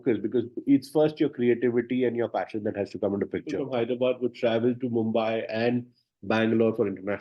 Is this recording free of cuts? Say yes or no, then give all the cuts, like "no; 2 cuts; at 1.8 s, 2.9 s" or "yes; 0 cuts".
no; 1 cut; at 3.6 s